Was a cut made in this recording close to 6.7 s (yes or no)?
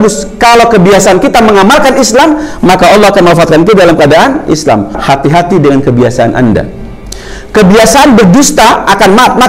no